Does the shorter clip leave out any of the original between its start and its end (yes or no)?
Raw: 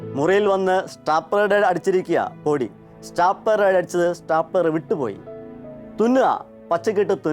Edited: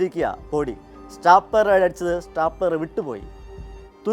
no